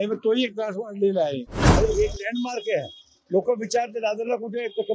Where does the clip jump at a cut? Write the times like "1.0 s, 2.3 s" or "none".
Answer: 1.7 s